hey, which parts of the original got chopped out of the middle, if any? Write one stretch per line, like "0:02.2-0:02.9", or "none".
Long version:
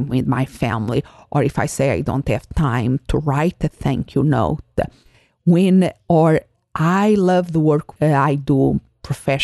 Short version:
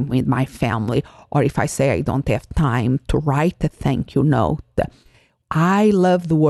0:05.3-0:06.5